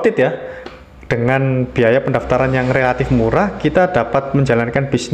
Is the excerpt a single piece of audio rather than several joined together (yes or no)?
yes